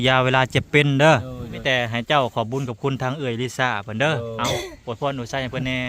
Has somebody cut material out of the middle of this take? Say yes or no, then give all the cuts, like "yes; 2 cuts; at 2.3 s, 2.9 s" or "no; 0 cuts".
yes; 1 cut; at 1.6 s